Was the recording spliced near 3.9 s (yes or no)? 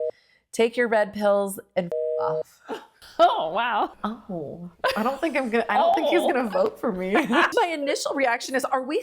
yes